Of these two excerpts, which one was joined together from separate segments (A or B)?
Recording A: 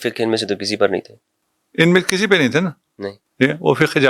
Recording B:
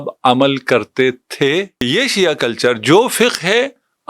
B